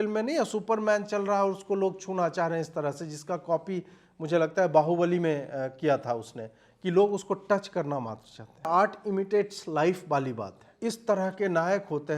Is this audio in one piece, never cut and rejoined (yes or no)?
no